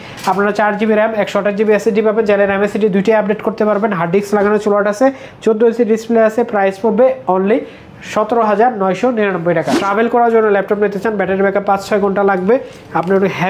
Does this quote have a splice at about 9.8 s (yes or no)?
yes